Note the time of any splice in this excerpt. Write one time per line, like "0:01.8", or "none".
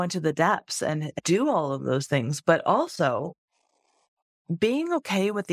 0:01.1